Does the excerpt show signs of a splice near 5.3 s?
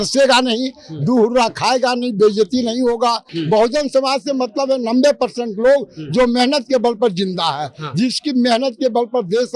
no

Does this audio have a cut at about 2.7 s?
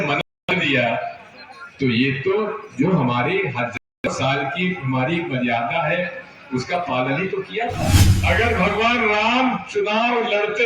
no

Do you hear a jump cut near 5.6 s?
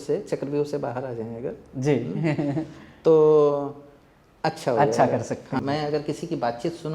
yes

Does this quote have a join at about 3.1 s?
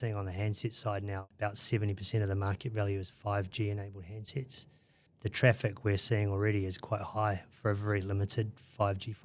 no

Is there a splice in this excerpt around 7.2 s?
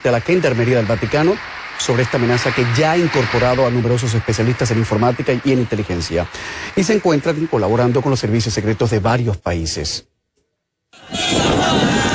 no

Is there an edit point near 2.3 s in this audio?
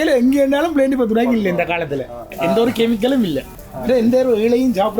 yes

